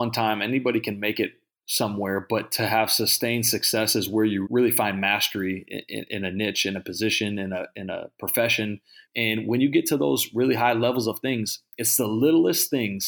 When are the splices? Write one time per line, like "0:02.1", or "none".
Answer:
0:04.4
0:09.0